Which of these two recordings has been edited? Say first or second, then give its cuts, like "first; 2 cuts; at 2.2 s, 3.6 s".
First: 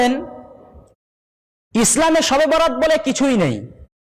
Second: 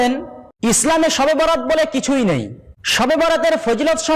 second; 2 cuts; at 0.8 s, 3.1 s